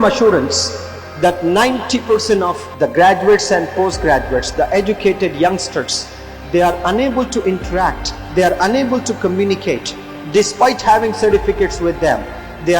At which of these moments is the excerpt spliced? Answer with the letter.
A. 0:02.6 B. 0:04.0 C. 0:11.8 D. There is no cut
A